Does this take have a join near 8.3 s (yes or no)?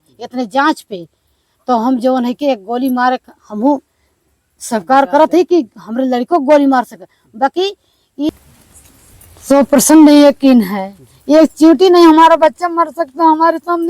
yes